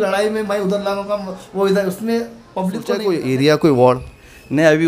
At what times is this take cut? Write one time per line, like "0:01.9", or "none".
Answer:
0:02.9